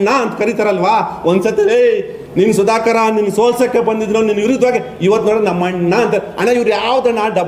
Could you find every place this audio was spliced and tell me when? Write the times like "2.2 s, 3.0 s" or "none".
none